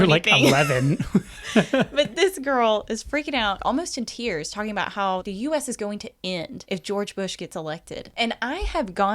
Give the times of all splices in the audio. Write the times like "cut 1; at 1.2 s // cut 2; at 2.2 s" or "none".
cut 1; at 3.6 s // cut 2; at 5.3 s // cut 3; at 6.6 s // cut 4; at 8.0 s

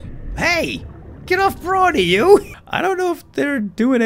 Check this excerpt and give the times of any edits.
cut 1; at 2.5 s

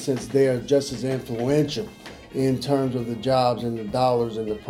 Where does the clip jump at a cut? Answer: none

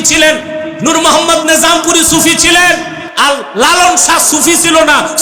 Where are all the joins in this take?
none

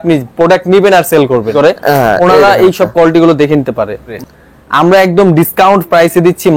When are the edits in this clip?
cut 1; at 1.5 s // cut 2; at 4.1 s

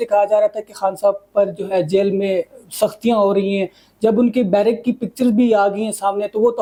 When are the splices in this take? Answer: none

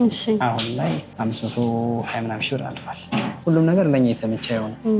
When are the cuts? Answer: cut 1; at 1.1 s // cut 2; at 3.4 s

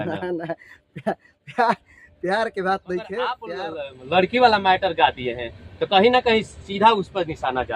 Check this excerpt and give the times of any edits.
cut 1; at 3.6 s

